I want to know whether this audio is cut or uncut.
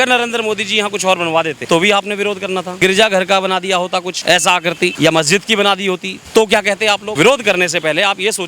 cut